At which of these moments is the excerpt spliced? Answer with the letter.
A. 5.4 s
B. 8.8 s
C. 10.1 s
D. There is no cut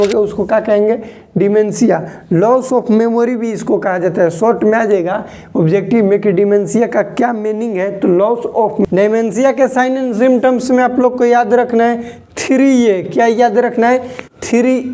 B